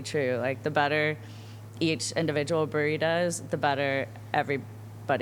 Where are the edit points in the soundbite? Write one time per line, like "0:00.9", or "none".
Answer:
none